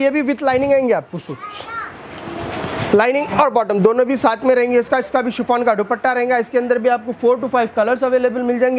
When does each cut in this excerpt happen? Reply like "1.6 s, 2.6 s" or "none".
none